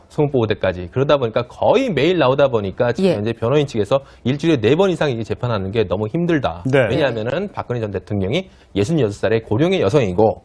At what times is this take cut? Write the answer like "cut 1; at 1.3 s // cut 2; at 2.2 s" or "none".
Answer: cut 1; at 4.8 s